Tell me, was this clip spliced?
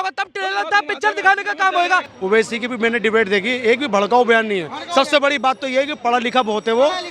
yes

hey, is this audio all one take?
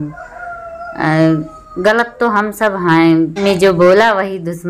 no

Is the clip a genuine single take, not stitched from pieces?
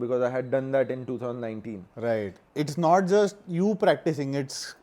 no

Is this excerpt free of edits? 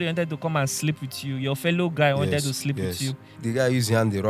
no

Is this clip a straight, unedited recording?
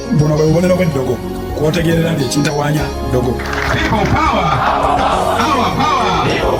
yes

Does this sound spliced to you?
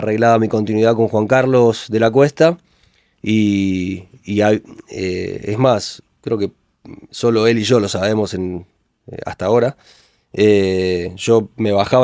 no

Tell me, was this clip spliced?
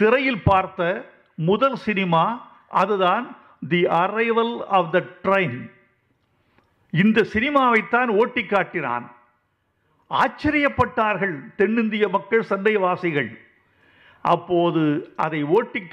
no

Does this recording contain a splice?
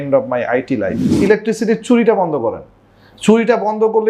yes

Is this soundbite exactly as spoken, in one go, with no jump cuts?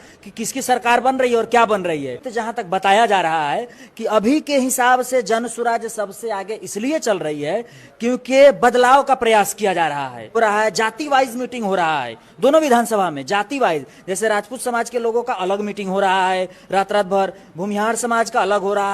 no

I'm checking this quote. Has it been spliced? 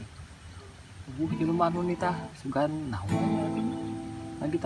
no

